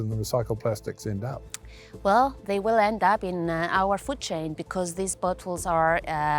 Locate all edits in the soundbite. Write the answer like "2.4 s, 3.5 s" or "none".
none